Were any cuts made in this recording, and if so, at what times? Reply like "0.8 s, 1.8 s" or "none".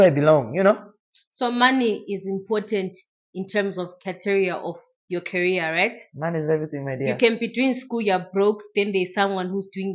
none